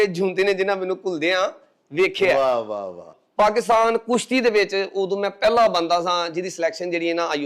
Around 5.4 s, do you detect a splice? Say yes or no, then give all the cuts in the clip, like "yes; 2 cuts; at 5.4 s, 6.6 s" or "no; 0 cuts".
no; 1 cut; at 3.2 s